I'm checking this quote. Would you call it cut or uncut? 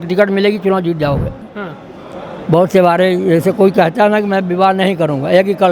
cut